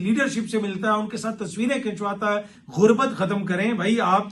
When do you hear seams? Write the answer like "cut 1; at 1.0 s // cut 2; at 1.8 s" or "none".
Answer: cut 1; at 2.6 s